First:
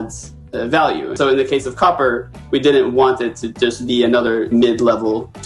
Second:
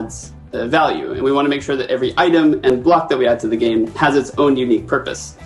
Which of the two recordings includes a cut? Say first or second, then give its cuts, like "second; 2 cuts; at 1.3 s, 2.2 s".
first; 2 cuts; at 1.1 s, 4.5 s